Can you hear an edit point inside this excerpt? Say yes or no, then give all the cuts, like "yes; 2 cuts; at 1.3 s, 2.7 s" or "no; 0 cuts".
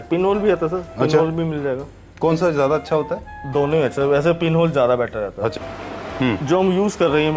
yes; 1 cut; at 5.5 s